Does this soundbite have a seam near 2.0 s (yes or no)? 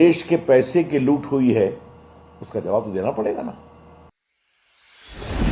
no